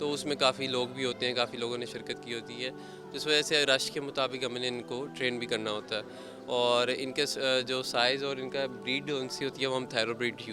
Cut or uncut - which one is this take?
uncut